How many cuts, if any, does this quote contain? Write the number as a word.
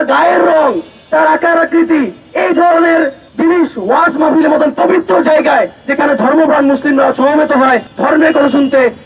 two